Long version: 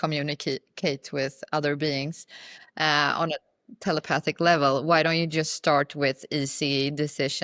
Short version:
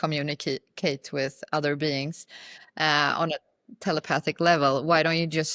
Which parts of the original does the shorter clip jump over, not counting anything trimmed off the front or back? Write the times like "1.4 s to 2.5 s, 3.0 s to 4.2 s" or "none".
none